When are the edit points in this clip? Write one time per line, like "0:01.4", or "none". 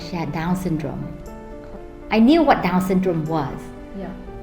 0:01.8